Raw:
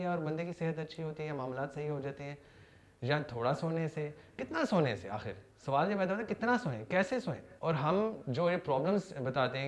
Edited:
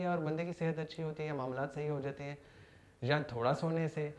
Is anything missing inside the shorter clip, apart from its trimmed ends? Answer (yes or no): no